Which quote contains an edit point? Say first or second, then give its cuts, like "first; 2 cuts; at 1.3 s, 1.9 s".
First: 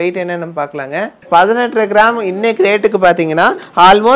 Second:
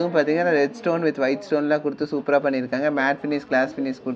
first; 1 cut; at 1.3 s